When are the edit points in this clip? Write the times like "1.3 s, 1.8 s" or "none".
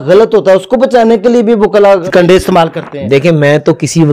2.0 s